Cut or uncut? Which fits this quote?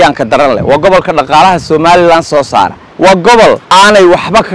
cut